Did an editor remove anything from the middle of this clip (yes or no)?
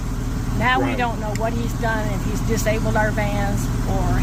no